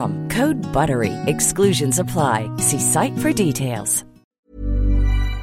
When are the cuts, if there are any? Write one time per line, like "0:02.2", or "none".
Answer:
0:04.3